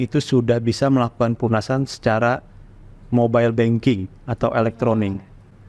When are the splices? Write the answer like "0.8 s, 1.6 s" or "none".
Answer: none